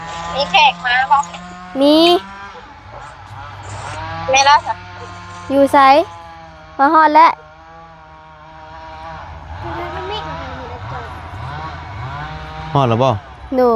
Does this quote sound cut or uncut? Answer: uncut